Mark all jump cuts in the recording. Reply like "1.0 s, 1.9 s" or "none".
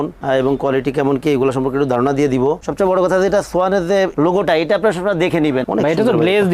2.6 s, 5.6 s